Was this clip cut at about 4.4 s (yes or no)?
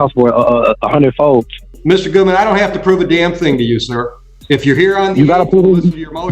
no